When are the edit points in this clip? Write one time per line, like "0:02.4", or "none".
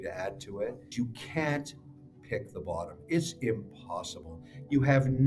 0:00.9